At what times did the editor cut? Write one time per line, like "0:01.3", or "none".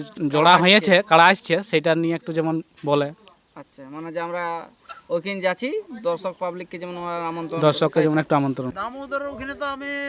0:08.7